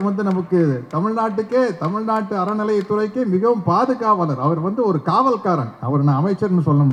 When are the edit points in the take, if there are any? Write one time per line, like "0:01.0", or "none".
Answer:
none